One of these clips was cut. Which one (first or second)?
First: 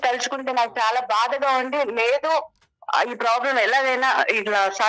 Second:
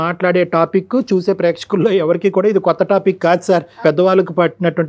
second